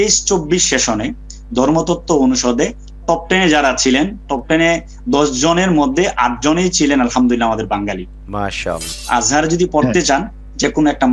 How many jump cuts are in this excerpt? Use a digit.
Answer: 1